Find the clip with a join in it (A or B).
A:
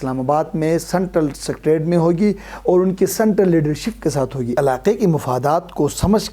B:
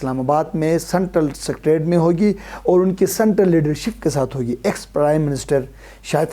A